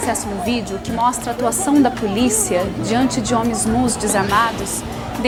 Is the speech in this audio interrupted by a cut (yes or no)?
no